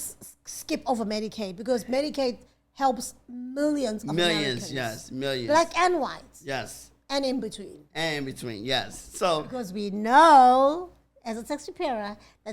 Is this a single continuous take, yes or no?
no